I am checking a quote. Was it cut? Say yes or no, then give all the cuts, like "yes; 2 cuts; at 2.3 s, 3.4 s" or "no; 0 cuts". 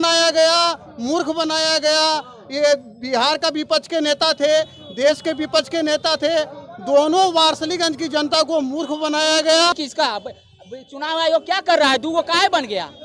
yes; 1 cut; at 9.7 s